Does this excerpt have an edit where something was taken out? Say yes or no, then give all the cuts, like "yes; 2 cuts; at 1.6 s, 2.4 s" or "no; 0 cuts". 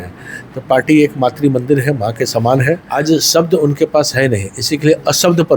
yes; 1 cut; at 2.9 s